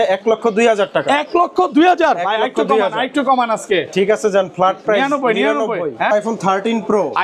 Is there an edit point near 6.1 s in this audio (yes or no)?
yes